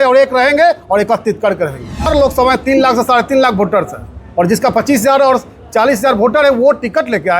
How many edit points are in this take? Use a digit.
1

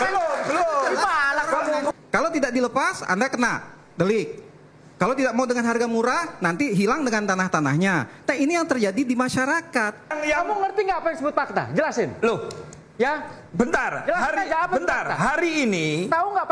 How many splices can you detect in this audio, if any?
2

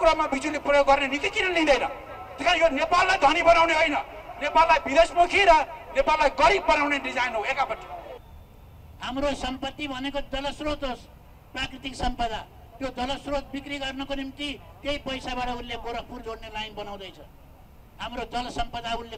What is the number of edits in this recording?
1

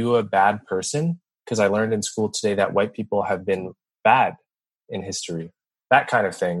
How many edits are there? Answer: 1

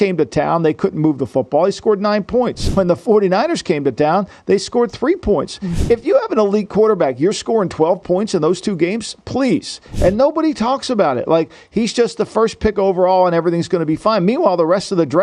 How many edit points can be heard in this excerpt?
2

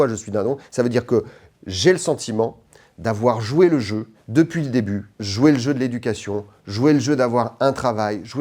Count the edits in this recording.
0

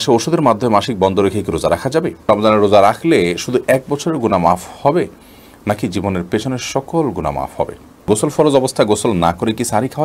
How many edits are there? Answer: 2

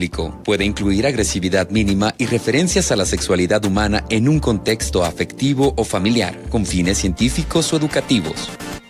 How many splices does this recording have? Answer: 0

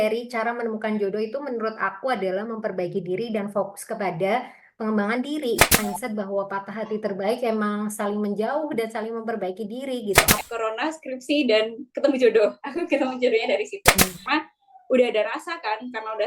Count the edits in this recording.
3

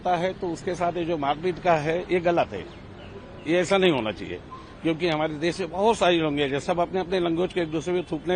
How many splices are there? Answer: 0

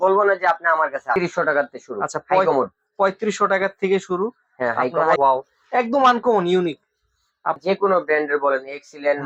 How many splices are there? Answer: 3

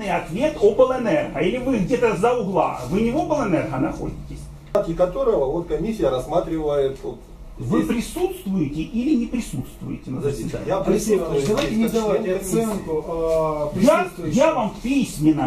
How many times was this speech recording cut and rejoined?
1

